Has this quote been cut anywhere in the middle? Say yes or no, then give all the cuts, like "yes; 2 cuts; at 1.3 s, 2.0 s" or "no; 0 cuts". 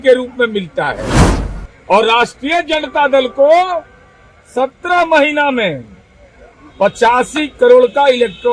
no; 0 cuts